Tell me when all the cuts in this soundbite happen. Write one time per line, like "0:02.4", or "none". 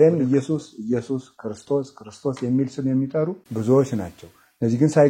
0:03.5